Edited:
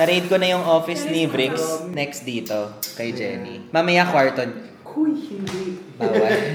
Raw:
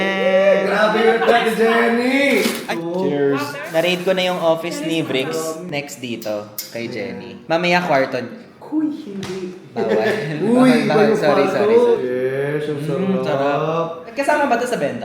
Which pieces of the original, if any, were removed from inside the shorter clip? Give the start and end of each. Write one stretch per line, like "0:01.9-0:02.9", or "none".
none